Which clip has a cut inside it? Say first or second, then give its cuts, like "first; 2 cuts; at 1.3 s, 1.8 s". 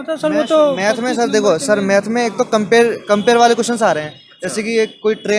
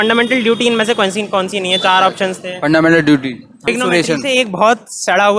second; 1 cut; at 3.6 s